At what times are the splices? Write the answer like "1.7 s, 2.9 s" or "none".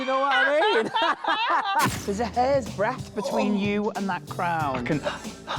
1.9 s